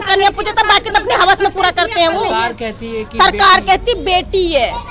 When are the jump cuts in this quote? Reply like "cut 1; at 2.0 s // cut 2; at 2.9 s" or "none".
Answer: none